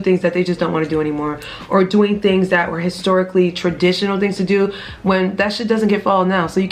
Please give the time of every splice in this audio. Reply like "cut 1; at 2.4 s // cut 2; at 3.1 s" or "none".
none